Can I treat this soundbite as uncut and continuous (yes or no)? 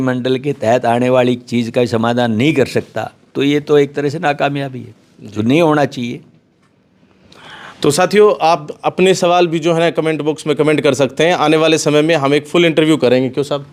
yes